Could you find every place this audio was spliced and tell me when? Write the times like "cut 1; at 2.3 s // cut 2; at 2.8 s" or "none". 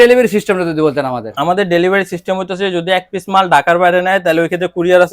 cut 1; at 1.3 s